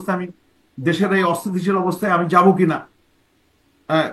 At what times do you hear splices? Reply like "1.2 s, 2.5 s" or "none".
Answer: none

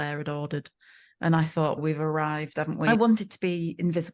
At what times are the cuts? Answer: 2.9 s

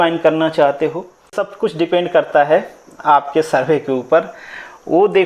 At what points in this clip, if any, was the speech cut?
1.4 s

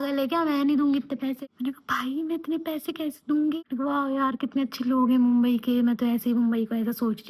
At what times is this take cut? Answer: 1.4 s, 3.6 s

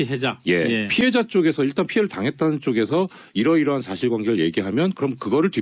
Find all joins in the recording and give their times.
3.4 s

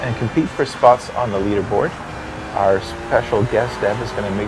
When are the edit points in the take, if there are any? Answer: 3.3 s

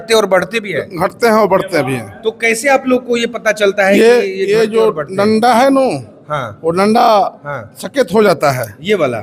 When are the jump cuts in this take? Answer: none

